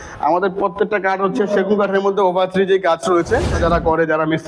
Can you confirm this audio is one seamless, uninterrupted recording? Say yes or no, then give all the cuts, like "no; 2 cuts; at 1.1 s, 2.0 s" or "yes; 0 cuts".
no; 1 cut; at 3.5 s